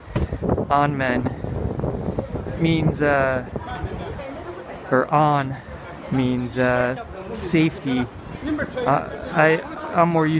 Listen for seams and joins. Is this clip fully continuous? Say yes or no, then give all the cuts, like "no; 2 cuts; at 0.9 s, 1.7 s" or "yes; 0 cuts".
yes; 0 cuts